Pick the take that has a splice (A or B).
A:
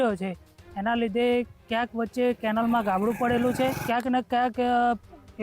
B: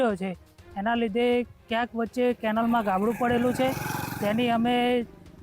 A